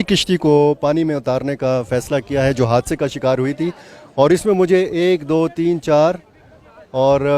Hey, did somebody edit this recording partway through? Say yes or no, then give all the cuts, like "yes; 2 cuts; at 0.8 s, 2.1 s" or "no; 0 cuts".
no; 0 cuts